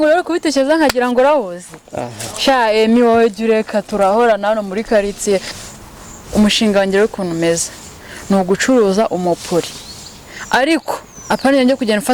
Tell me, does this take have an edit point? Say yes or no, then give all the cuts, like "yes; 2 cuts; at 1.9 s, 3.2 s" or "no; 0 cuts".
yes; 1 cut; at 5.5 s